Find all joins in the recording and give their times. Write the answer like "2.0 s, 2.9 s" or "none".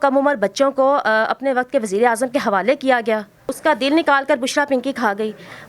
3.5 s